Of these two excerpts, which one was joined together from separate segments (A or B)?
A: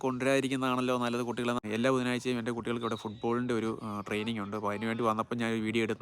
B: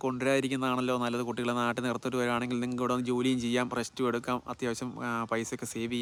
A